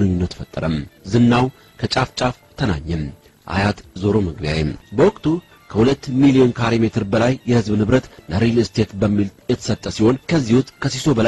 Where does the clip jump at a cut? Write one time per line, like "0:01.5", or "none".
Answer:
0:04.8